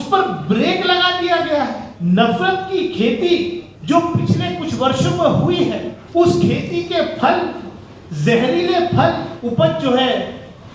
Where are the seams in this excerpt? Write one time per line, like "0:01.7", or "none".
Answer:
0:01.9
0:03.7
0:05.9
0:09.3